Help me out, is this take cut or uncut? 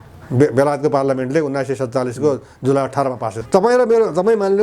cut